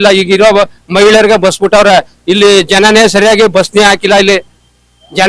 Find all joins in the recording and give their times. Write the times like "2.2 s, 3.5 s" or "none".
none

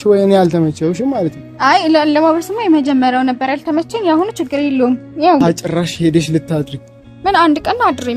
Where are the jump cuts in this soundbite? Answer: 5.4 s

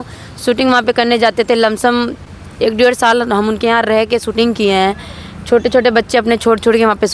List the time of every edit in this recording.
none

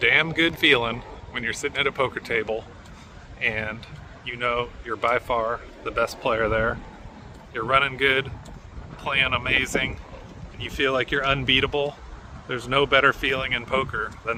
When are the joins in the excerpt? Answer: none

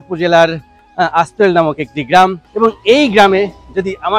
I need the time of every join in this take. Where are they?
none

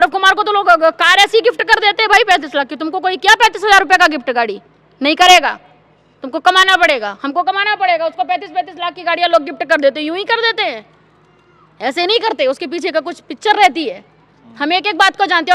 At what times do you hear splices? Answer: none

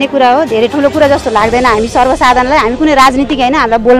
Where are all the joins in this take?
none

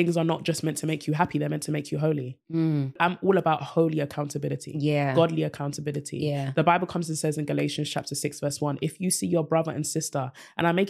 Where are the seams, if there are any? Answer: 2.9 s

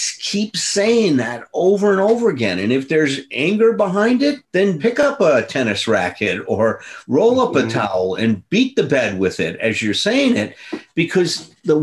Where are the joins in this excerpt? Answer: 4.8 s

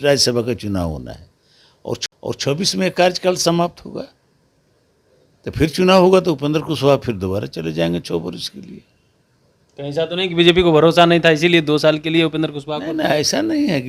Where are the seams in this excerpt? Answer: none

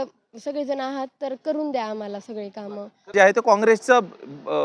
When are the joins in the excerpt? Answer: 3.1 s

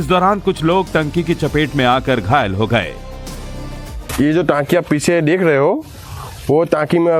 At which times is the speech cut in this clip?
none

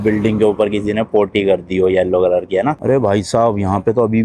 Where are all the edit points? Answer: 2.8 s

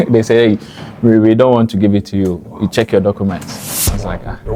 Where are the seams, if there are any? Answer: none

